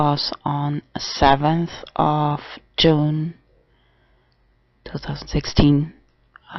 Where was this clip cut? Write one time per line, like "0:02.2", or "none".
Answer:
0:03.3